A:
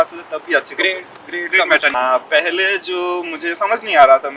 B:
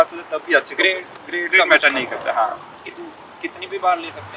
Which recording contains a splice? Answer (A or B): A